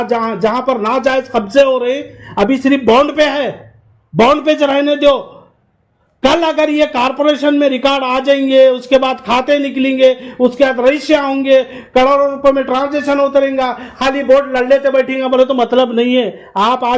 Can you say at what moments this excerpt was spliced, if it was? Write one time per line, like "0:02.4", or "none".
none